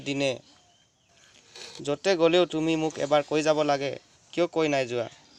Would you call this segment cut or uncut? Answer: uncut